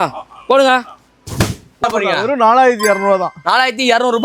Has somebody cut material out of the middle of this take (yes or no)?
yes